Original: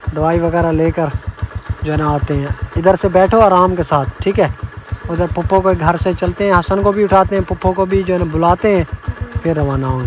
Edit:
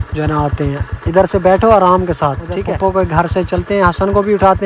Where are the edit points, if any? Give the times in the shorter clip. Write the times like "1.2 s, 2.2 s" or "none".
2.5 s

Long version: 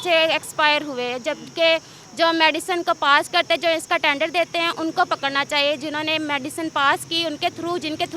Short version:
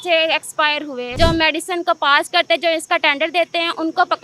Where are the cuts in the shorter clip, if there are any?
1.1 s

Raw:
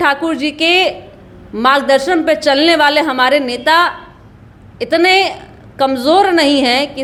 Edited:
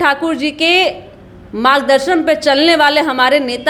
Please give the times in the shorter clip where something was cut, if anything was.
none

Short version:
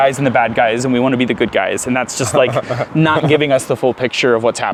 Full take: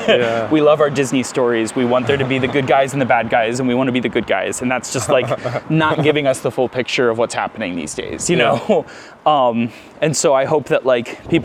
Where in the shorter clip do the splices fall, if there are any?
none

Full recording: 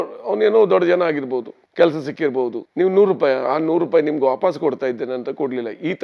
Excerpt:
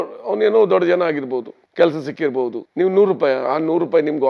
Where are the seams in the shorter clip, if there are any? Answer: none

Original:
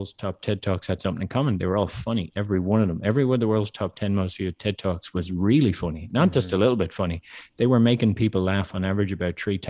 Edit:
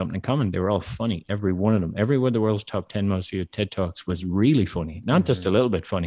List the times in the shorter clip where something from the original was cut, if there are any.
none

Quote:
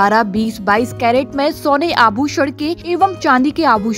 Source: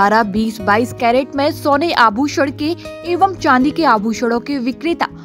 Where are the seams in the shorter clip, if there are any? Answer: 2.8 s

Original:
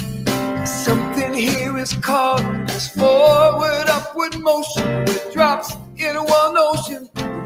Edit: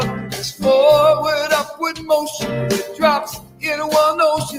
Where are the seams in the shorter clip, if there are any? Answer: none

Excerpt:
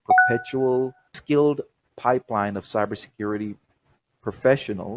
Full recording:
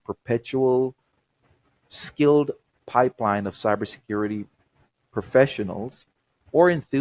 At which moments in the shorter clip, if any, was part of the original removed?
1.1 s

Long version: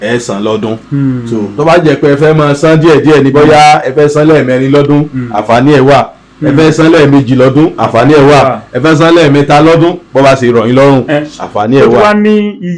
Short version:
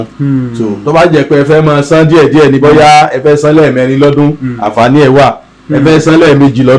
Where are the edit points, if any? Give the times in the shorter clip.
none

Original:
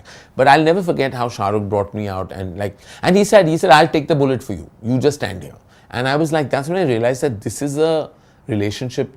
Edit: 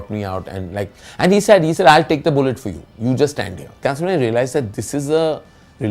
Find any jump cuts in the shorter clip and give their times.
3.8 s

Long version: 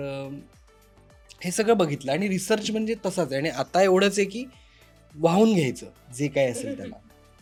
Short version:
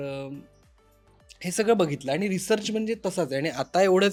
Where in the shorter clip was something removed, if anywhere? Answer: none

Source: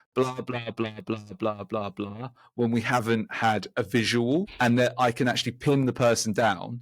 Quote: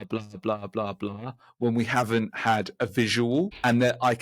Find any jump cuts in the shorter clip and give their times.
none

